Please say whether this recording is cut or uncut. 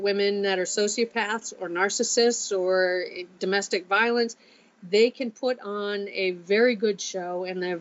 uncut